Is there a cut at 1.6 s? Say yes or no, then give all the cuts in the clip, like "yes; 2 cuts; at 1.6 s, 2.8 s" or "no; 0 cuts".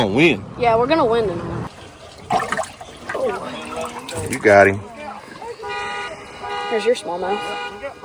yes; 1 cut; at 1.6 s